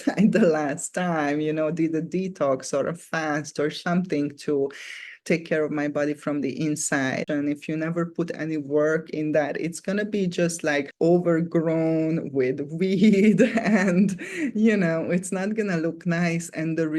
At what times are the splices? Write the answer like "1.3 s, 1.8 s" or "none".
7.2 s